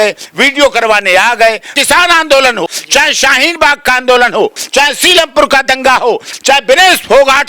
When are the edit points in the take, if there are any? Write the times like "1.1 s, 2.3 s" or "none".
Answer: 1.7 s, 2.7 s, 4.6 s, 6.3 s